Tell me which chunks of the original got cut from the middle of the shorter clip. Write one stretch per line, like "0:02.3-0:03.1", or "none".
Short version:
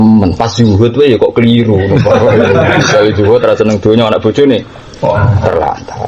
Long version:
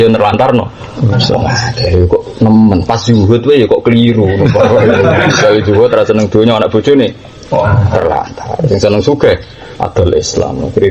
none